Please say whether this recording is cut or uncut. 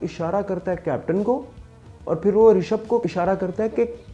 cut